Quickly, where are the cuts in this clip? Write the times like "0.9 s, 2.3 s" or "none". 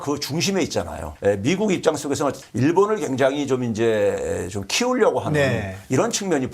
1.0 s, 2.4 s